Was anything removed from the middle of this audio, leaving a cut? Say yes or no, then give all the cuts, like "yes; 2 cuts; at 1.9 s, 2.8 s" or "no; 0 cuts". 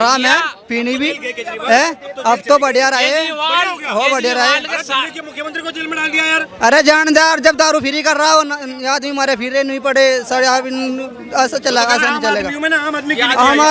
no; 0 cuts